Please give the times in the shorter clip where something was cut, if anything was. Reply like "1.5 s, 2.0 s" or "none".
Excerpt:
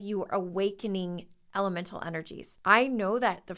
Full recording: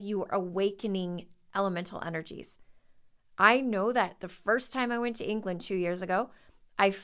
2.4 s